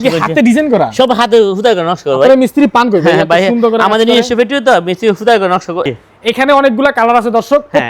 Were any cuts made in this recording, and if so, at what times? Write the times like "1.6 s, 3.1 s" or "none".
5.9 s